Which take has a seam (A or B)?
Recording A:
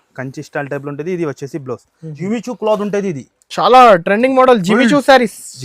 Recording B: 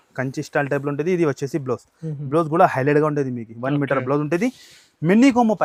A